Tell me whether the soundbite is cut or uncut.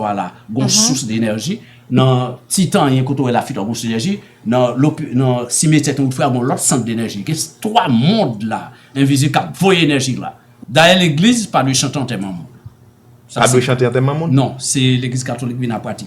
cut